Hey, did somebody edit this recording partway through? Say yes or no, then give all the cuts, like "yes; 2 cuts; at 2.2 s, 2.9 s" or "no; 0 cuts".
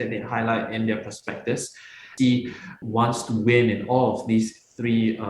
yes; 2 cuts; at 2.1 s, 2.8 s